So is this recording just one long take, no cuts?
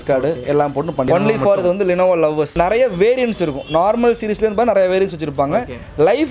no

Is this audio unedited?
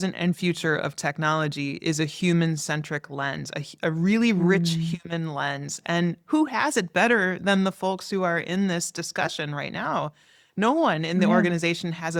yes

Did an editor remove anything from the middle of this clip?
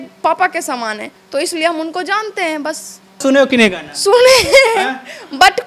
yes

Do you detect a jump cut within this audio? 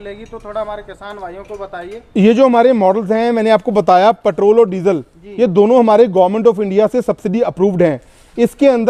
no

